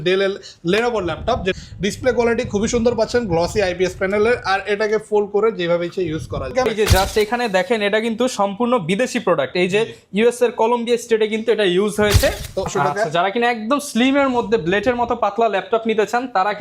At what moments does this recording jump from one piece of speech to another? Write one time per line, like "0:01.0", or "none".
0:01.5
0:06.7
0:12.7